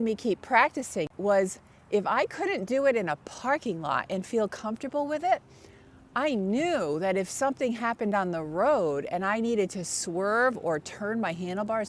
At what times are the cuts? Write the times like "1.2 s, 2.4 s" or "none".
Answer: 1.1 s